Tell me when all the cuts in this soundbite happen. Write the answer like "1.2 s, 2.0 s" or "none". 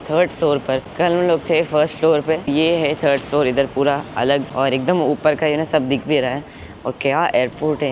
none